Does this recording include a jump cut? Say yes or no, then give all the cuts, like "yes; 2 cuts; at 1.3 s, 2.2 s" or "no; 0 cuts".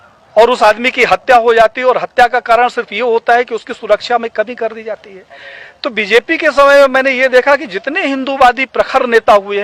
no; 0 cuts